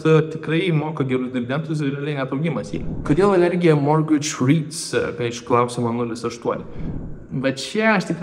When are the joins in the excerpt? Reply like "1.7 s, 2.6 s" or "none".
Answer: none